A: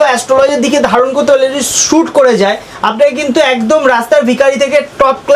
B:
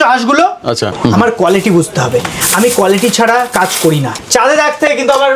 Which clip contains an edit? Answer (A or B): B